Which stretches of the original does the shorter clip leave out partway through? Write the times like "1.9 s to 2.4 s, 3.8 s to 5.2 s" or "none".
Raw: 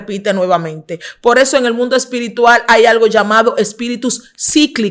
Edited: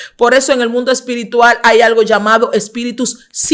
none